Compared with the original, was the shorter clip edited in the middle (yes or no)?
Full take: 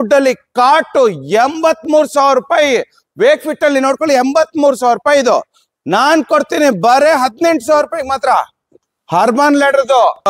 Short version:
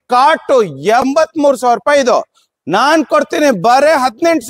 yes